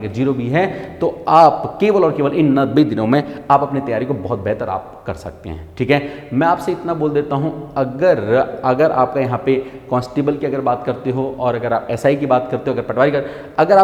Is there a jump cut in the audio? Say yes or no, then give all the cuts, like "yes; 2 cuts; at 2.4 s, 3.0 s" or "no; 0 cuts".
no; 0 cuts